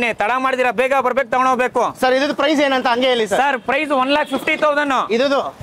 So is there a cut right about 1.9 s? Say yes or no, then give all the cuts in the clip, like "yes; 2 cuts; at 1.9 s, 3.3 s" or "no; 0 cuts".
no; 0 cuts